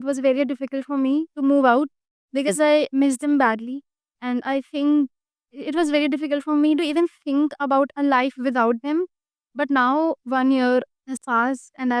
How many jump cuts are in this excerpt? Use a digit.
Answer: 0